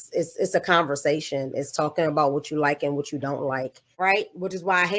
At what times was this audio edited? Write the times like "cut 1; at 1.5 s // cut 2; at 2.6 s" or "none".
cut 1; at 3.9 s

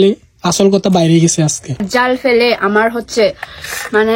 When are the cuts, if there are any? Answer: cut 1; at 1.9 s

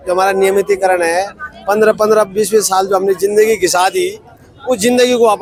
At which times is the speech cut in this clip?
none

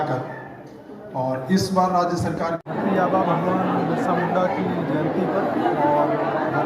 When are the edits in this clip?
cut 1; at 2.7 s

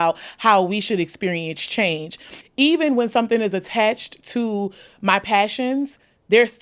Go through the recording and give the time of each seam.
cut 1; at 2.3 s

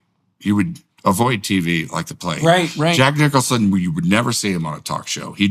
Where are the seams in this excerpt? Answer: none

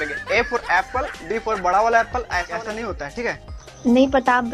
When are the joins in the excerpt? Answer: cut 1; at 2.5 s

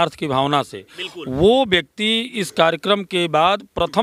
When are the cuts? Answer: none

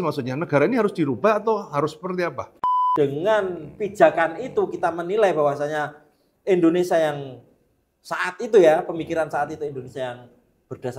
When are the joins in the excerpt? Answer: cut 1; at 2.5 s

